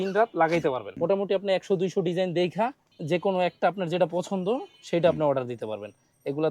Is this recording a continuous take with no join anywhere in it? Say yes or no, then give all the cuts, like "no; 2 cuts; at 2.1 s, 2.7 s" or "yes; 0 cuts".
no; 2 cuts; at 0.9 s, 2.9 s